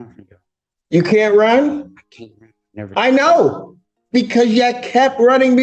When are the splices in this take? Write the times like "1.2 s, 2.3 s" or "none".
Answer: none